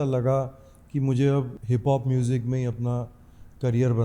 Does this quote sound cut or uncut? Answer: cut